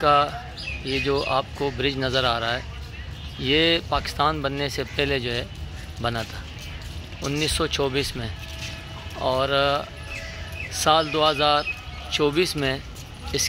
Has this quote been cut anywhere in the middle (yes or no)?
no